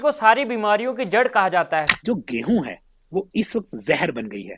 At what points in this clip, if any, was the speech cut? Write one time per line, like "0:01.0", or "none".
0:01.9